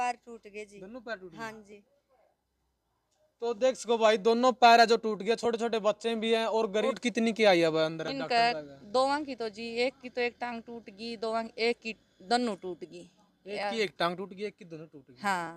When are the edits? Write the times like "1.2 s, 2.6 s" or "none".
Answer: 7.0 s

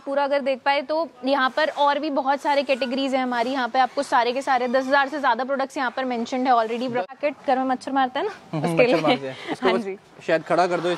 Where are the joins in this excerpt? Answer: 7.1 s

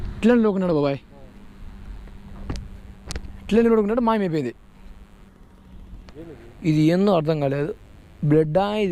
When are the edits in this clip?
6.1 s

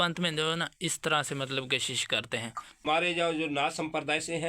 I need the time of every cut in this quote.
2.7 s

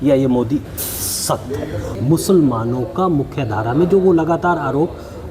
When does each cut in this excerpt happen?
1.9 s

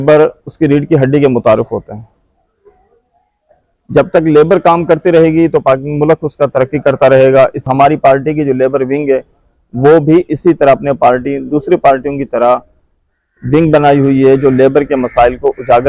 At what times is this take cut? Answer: 7.7 s

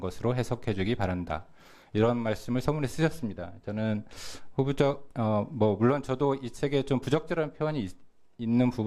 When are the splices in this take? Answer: 4.7 s

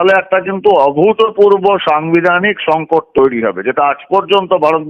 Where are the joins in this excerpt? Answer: none

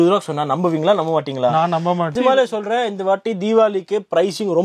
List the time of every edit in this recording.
2.1 s

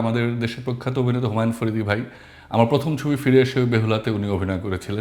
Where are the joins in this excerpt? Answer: none

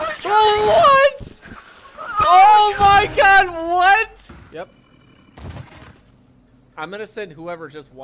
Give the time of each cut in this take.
4.3 s

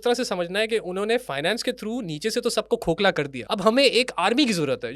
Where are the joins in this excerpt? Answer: 3.4 s

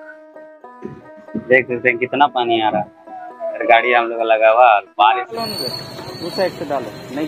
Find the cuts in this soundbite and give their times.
5.3 s

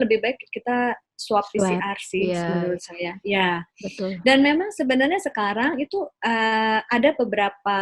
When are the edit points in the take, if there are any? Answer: none

